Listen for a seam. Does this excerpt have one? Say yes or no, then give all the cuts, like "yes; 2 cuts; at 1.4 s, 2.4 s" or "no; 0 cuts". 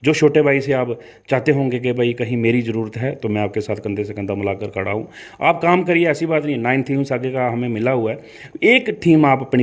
no; 0 cuts